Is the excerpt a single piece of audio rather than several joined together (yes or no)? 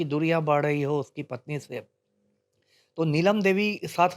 yes